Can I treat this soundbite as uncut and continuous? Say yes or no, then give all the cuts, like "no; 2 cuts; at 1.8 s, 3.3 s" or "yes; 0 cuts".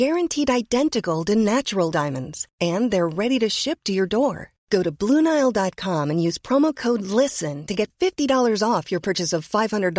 yes; 0 cuts